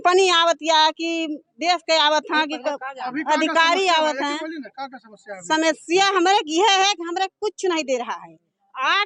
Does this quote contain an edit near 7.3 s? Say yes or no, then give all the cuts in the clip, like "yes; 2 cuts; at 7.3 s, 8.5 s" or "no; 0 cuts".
no; 0 cuts